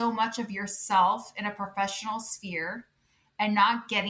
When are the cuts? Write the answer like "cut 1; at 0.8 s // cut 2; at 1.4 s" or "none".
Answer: none